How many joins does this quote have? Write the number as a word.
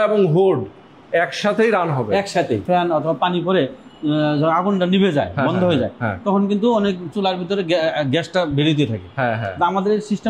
one